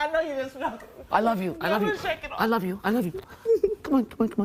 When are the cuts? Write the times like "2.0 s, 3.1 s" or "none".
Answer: none

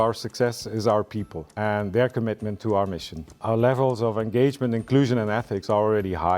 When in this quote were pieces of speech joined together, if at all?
1.5 s, 3.4 s

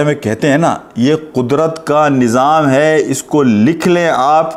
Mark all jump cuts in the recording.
none

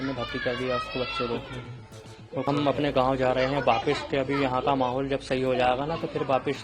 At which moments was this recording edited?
2.5 s

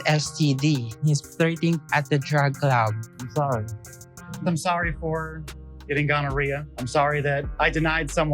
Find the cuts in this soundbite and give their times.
3.0 s

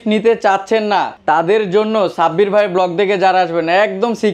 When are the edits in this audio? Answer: 1.1 s

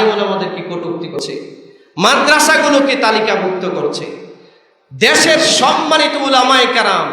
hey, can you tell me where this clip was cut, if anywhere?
1.1 s

